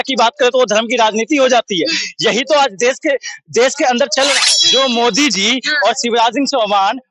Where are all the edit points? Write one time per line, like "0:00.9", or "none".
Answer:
0:04.4